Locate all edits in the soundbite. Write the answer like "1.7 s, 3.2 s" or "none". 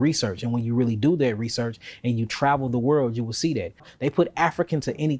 3.9 s